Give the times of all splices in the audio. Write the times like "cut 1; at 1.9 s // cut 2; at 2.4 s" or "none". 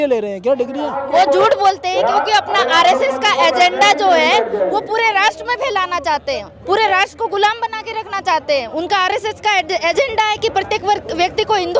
cut 1; at 1.0 s